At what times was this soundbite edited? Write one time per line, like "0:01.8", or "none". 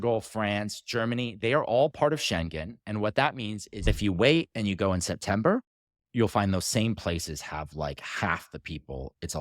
0:03.9